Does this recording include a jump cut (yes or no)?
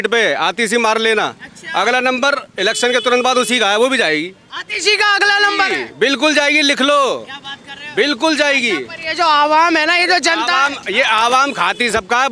no